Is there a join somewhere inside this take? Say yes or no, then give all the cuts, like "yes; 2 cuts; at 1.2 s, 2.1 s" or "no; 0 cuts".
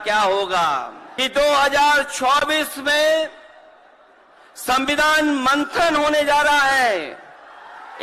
yes; 1 cut; at 1.0 s